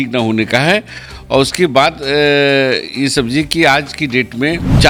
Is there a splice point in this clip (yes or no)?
no